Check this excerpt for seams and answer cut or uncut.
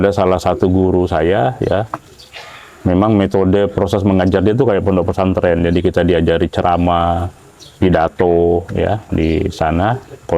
uncut